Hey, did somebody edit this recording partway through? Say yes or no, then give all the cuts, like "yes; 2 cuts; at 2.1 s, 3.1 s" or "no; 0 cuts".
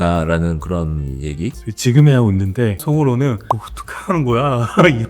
yes; 3 cuts; at 1.7 s, 2.8 s, 3.4 s